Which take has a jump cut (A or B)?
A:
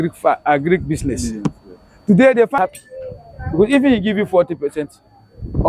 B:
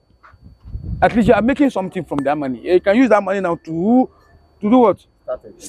A